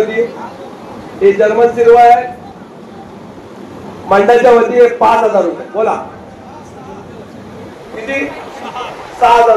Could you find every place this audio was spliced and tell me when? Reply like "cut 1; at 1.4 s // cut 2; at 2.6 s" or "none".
none